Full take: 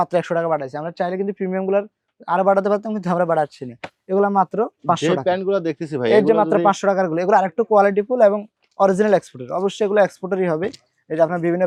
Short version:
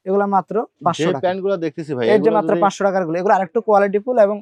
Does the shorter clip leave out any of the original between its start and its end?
no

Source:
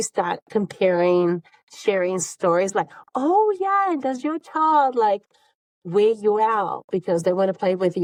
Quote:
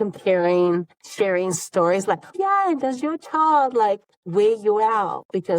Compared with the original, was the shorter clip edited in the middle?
yes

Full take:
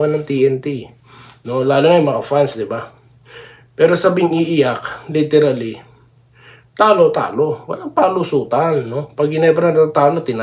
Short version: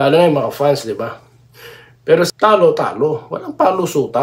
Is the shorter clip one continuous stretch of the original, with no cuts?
no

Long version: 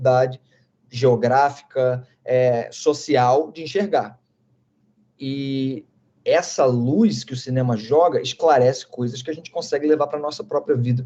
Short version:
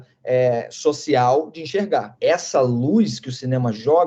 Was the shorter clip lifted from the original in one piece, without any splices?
no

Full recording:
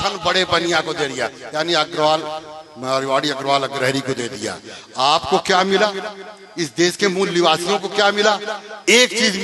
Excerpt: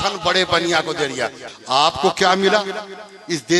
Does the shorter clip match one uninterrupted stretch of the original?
no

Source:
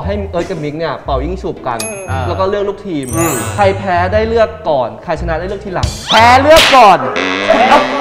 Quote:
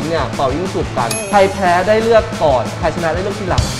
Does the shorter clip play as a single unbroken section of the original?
no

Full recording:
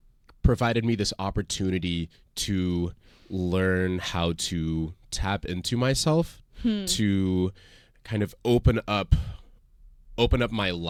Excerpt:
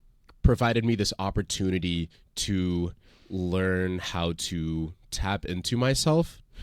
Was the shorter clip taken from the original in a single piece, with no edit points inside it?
yes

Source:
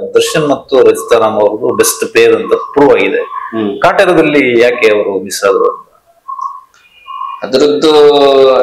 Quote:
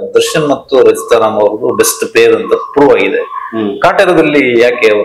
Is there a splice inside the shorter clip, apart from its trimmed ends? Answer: no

